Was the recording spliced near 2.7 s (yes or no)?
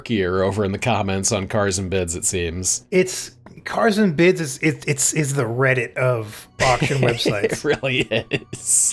no